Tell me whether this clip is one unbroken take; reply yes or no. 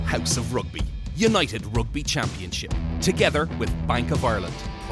yes